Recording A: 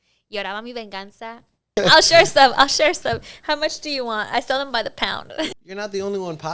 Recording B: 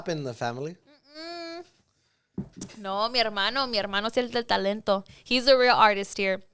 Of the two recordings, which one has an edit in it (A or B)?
A